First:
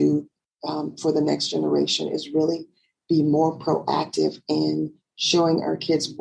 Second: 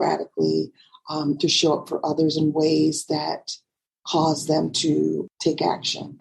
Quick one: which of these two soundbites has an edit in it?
second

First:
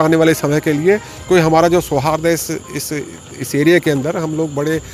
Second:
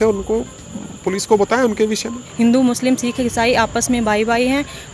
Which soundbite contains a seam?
second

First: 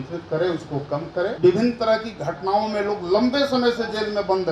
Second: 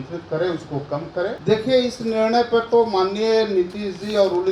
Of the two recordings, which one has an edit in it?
first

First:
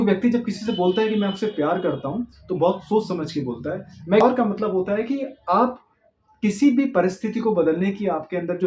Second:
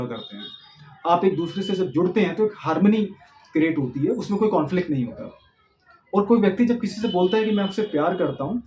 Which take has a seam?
first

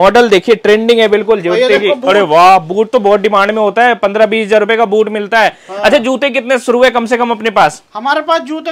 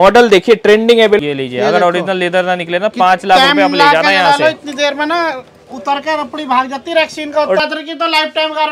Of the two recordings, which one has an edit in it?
second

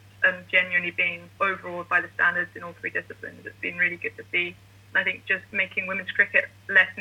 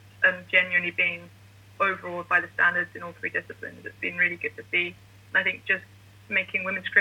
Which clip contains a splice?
first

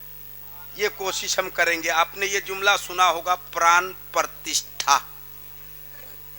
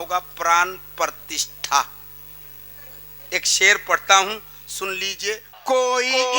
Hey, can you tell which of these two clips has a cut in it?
second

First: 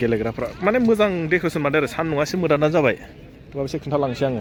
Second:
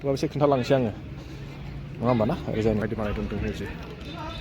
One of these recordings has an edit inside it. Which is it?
second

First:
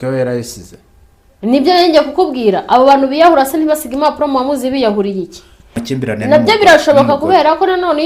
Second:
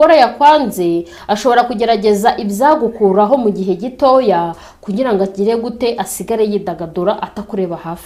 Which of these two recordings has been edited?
first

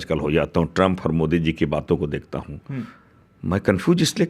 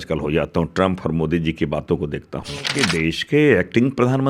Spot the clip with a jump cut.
second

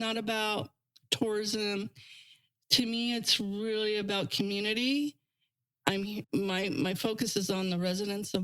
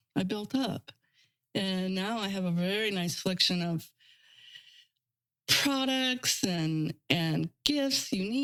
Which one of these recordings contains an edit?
first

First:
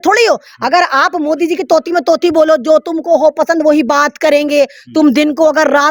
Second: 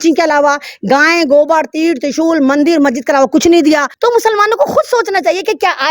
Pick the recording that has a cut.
second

